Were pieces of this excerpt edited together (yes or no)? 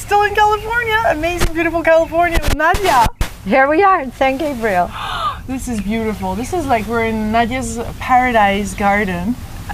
no